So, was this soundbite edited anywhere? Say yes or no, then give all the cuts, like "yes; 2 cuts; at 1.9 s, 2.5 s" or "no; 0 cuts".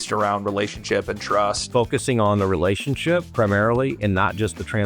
yes; 1 cut; at 1.7 s